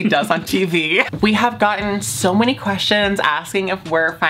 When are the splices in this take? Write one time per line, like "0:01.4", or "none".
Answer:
0:01.1